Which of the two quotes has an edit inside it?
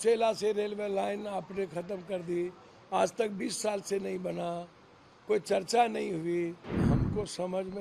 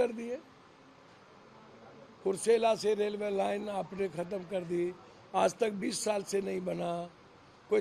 first; 1 cut; at 6.8 s

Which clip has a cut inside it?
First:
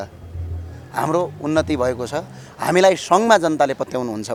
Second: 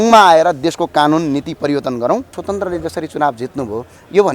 second; 1 cut; at 2.4 s

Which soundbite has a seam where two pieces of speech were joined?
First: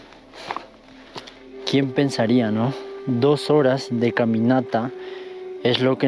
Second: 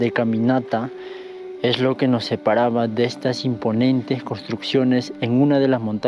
first; 1 cut; at 1.4 s

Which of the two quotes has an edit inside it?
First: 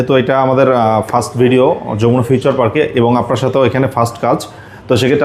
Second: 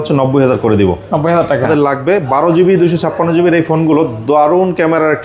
second; 1 cut; at 1.7 s

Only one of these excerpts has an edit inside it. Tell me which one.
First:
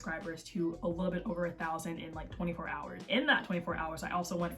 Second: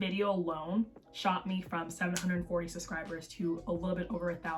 first; 1 cut; at 3.0 s

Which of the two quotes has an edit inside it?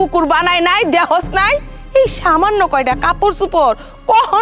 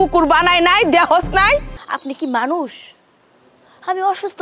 second; 1 cut; at 1.8 s

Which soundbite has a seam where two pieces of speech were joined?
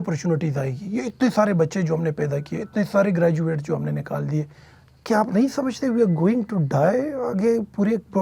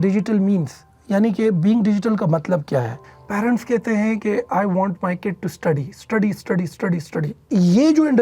second; 2 cuts; at 2.9 s, 7.4 s

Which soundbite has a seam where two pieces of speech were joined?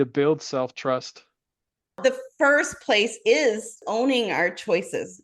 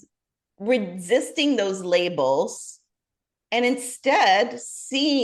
first; 2 cuts; at 2.0 s, 3.8 s

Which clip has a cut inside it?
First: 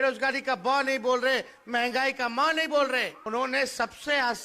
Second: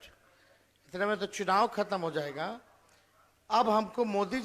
first; 1 cut; at 3.2 s

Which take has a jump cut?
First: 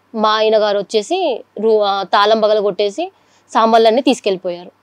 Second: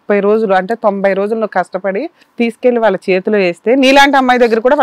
second; 1 cut; at 2.2 s

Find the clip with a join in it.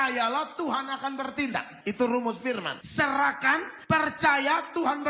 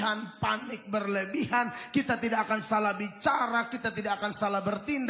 first; 3 cuts; at 1.7 s, 2.8 s, 3.7 s

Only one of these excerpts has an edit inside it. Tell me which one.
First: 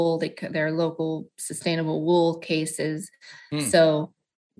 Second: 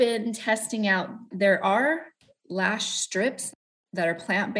second; 2 cuts; at 1.2 s, 3.4 s

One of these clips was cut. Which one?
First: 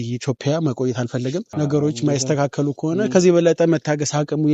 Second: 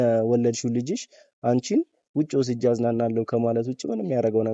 first; 1 cut; at 1.5 s

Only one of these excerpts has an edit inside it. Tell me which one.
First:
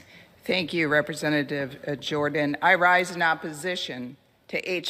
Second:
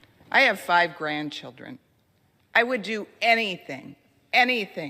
second; 1 cut; at 1.9 s

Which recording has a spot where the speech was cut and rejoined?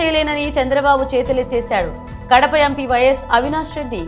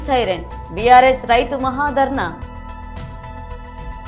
second; 1 cut; at 2.8 s

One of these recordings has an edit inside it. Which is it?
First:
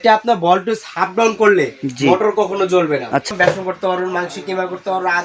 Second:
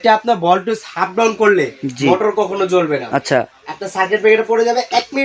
first; 1 cut; at 3.3 s

